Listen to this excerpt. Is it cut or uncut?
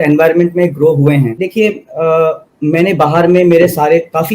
cut